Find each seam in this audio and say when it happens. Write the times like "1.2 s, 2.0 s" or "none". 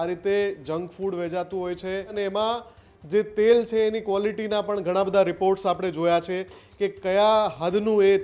2.1 s

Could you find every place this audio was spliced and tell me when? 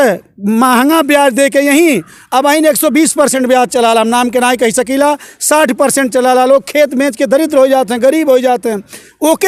none

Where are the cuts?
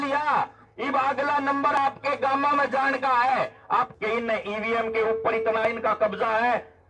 3.9 s

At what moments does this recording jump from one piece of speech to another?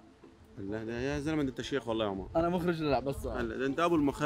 none

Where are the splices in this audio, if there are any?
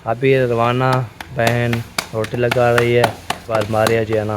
3.5 s

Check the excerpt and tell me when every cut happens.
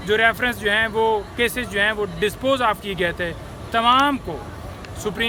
none

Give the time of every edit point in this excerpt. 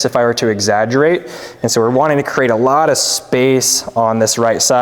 none

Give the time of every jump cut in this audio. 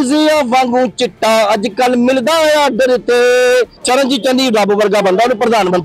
3.8 s

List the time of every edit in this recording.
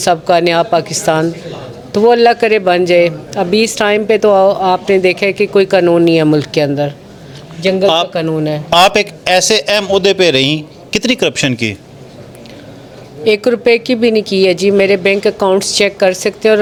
none

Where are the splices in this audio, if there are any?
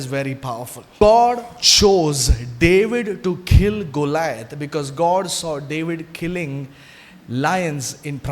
1.0 s

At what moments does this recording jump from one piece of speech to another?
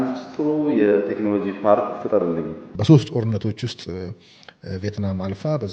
2.7 s

